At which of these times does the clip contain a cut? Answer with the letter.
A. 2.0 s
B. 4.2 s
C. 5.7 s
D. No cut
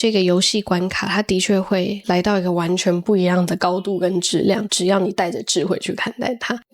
A